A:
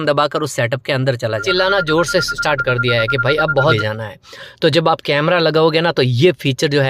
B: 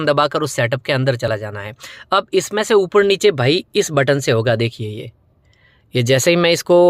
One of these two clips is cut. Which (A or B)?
A